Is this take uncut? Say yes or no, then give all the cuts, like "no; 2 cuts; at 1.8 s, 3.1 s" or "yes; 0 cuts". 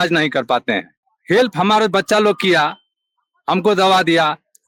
yes; 0 cuts